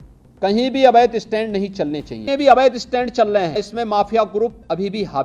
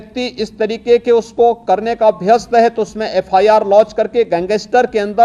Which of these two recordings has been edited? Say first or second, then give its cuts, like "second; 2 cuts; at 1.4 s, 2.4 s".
first; 2 cuts; at 2.1 s, 3.7 s